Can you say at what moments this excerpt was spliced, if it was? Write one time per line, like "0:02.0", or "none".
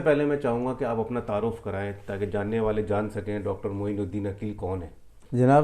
none